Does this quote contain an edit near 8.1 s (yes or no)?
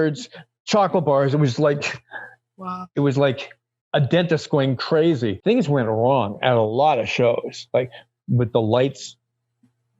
no